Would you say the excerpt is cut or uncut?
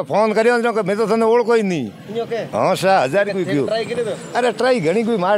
uncut